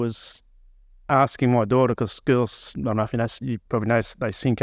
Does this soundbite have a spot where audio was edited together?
no; 0 cuts

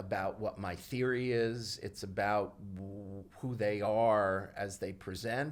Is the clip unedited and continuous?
yes; 0 cuts

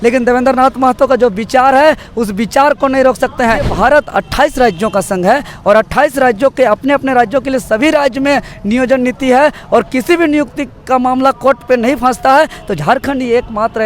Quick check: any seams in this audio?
yes; 1 cut; at 3.7 s

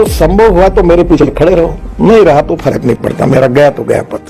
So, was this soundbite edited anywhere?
no; 0 cuts

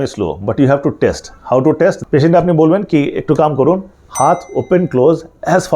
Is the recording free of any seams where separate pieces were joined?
no; 1 cut; at 2.0 s

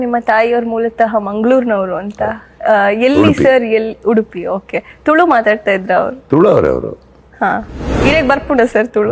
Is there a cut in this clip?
no; 0 cuts

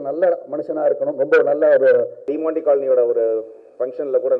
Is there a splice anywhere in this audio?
yes; 1 cut; at 2.3 s

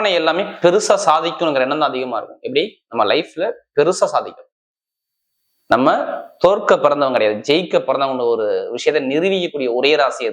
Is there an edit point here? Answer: no; 0 cuts

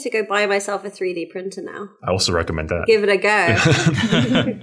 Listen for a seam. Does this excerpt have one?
no; 0 cuts

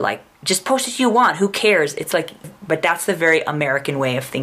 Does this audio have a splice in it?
yes; 1 cut; at 2.5 s

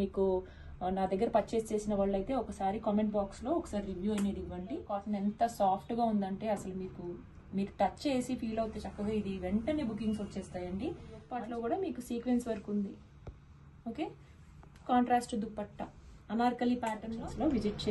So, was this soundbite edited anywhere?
yes; 3 cuts; at 5.0 s, 11.3 s, 17.1 s

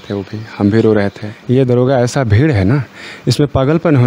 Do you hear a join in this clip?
yes; 1 cut; at 1.3 s

